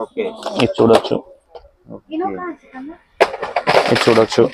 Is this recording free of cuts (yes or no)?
yes